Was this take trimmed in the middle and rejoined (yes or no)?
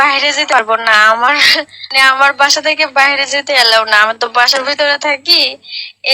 no